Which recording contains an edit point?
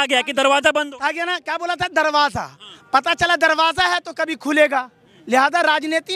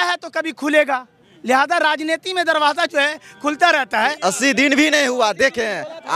second; 1 cut; at 4.2 s

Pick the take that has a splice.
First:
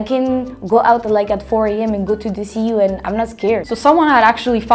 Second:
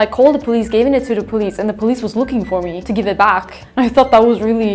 first; 1 cut; at 3.6 s

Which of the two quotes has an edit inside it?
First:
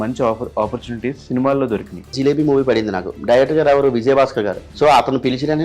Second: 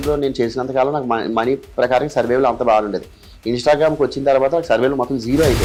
first; 2 cuts; at 2.1 s, 4.6 s

